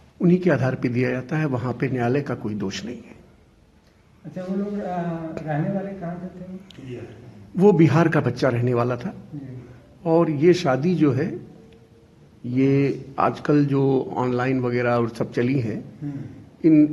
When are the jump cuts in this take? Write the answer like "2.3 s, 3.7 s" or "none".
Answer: none